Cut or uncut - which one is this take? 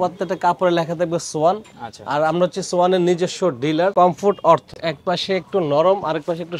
cut